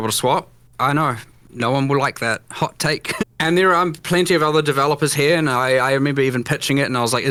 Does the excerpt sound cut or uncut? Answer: uncut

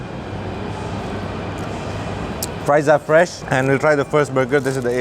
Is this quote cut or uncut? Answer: cut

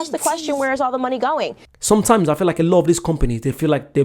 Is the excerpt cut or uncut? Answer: cut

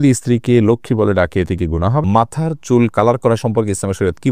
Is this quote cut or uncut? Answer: cut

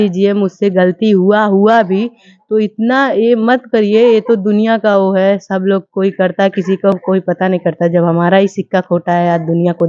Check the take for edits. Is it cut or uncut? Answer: uncut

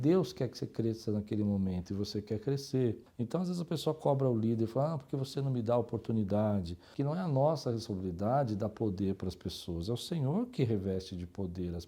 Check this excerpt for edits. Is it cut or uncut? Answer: cut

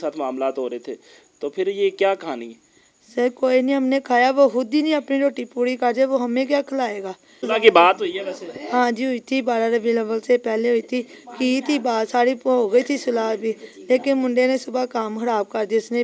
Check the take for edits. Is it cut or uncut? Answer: cut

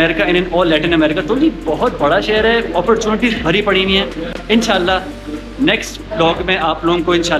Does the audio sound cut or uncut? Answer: uncut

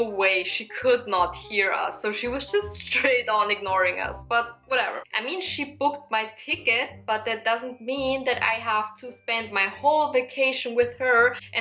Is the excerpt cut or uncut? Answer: uncut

